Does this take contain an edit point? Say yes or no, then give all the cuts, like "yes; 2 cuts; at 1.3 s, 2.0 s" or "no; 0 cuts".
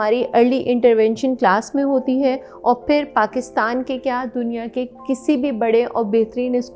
no; 0 cuts